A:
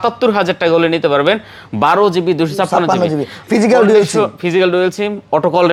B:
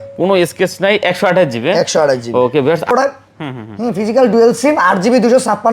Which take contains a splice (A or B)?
B